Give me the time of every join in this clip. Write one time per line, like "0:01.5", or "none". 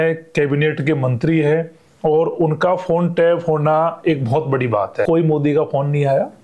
0:05.1